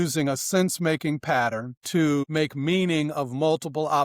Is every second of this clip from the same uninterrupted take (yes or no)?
no